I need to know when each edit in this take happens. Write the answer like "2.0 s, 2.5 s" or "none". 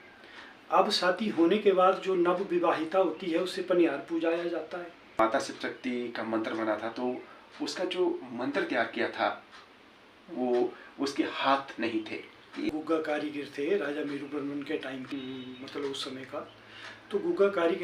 5.2 s, 12.7 s, 15.0 s